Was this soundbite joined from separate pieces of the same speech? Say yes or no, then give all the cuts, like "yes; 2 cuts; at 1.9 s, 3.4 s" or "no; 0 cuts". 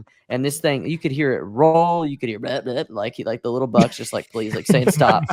no; 0 cuts